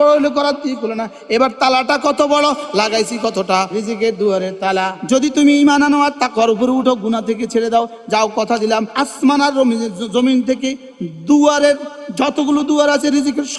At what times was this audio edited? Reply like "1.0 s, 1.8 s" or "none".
3.7 s, 4.9 s, 8.9 s